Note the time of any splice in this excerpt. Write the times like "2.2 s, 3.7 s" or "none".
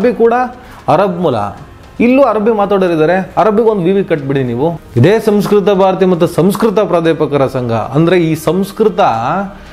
4.8 s